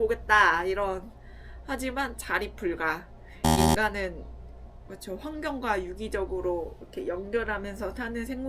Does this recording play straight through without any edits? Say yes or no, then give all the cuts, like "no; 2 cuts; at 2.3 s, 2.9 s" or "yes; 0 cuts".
yes; 0 cuts